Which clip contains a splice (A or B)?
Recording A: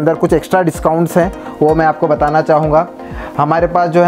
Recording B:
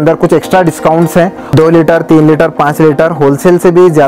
B